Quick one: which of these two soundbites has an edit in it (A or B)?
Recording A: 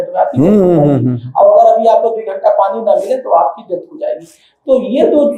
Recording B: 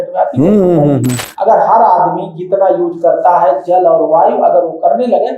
B